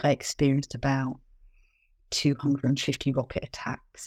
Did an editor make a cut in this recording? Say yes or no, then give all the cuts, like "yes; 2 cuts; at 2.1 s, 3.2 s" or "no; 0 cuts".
no; 0 cuts